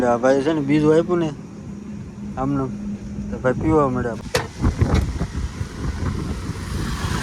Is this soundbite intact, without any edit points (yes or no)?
no